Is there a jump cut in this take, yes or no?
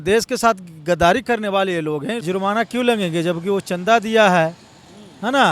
yes